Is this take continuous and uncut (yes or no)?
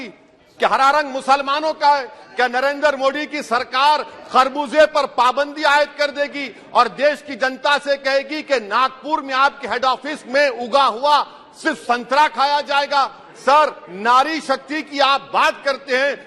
yes